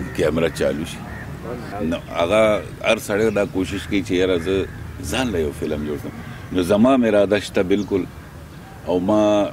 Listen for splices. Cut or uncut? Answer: cut